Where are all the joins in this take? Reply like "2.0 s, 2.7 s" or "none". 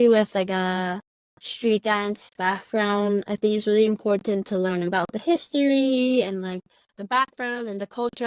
none